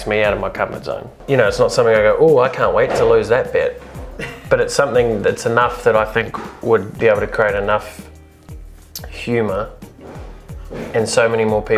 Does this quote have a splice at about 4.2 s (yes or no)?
no